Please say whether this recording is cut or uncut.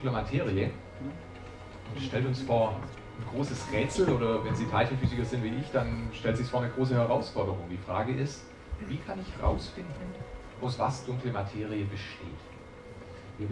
uncut